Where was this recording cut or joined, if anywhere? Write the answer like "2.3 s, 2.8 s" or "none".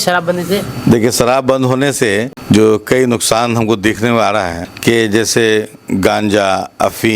2.3 s, 4.6 s